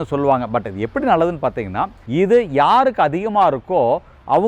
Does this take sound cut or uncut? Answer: cut